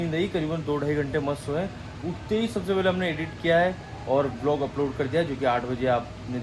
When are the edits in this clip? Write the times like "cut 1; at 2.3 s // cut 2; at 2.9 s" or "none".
none